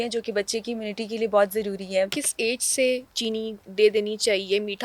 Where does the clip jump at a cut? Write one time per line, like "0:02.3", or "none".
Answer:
0:02.2
0:03.1